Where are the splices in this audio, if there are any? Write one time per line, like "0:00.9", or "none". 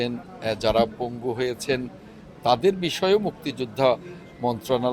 none